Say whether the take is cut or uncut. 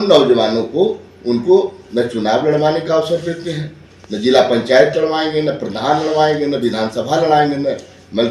uncut